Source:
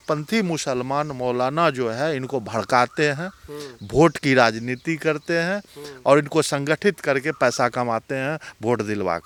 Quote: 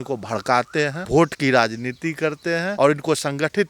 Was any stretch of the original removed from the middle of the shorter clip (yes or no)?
yes